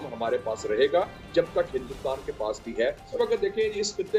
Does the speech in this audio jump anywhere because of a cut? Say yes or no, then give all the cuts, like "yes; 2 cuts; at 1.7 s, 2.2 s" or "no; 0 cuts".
yes; 1 cut; at 3.1 s